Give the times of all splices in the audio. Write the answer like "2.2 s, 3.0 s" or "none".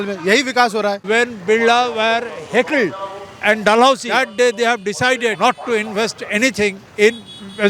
1.0 s, 4.1 s, 5.4 s